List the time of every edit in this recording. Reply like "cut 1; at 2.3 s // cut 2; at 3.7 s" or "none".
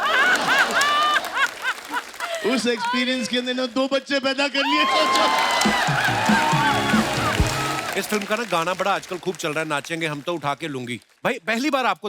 cut 1; at 7.8 s